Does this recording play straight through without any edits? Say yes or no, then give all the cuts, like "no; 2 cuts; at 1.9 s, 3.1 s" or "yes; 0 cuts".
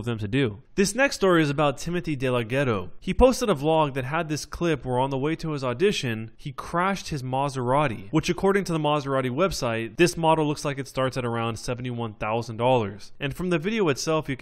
yes; 0 cuts